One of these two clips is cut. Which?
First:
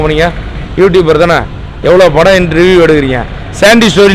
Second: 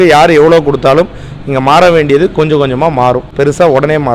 second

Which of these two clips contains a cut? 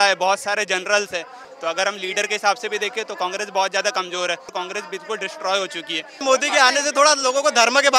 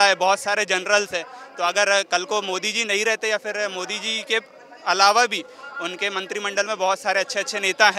first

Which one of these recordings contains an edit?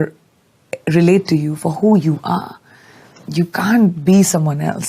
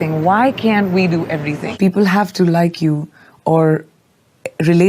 second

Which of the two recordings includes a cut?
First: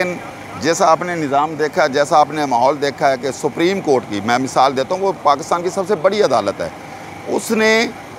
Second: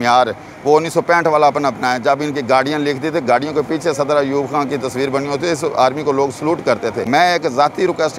second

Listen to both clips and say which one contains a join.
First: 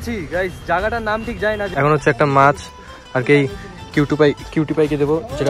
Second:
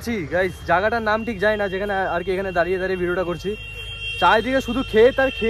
first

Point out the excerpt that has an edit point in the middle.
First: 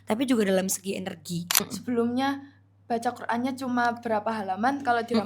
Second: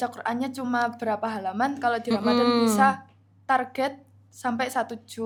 first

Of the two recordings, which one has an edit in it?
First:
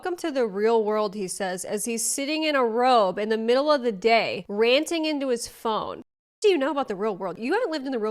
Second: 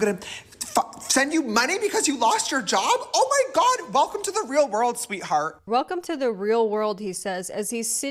first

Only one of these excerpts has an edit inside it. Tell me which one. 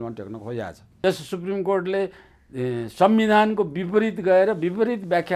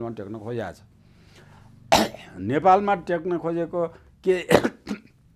first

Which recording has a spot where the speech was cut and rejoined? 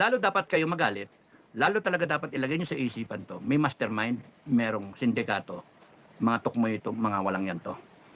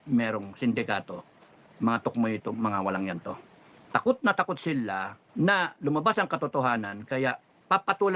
second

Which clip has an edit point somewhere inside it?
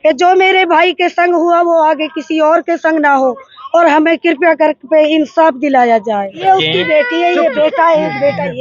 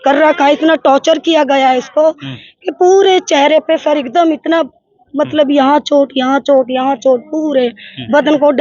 first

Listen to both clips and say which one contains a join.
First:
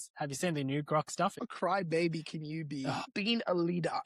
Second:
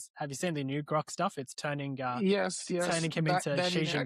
first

